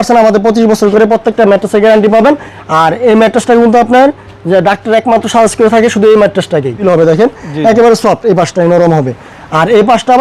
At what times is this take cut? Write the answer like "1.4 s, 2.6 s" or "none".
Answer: 2.5 s, 6.8 s